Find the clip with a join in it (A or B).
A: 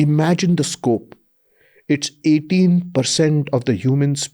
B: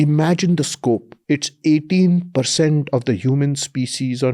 B